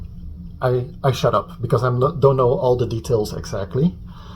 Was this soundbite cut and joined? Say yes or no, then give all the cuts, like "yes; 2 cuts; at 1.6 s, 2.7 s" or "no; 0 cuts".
no; 0 cuts